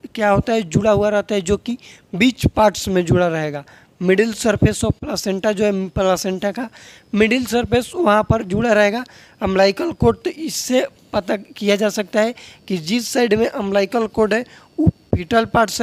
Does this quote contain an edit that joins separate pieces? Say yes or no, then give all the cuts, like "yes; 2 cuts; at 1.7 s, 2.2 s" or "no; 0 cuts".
no; 0 cuts